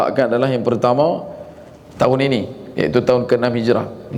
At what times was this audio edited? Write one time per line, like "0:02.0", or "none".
none